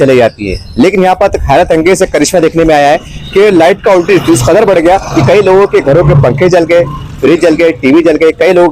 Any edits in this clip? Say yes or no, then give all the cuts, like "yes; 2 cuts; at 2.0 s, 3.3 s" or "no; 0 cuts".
no; 0 cuts